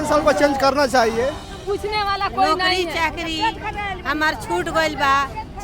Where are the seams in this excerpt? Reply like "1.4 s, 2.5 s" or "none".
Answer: 1.5 s